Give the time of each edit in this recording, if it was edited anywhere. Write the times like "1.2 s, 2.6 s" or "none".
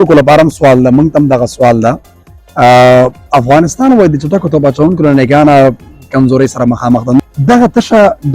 7.2 s